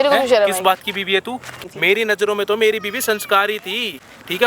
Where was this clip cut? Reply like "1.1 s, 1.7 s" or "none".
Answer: 1.6 s